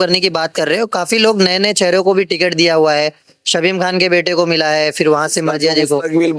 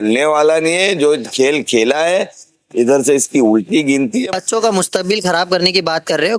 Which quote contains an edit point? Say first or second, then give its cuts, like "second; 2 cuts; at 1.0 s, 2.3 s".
second; 1 cut; at 4.3 s